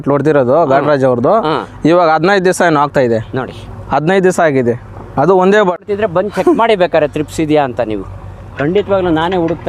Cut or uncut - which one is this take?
cut